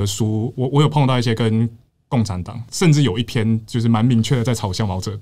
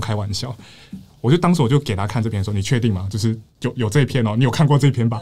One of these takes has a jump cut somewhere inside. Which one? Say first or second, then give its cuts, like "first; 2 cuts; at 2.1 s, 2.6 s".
first; 1 cut; at 2.6 s